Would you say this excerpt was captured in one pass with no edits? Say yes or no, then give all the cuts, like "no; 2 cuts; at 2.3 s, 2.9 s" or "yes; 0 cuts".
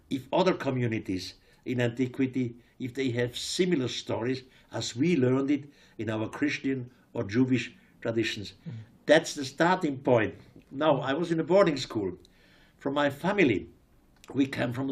yes; 0 cuts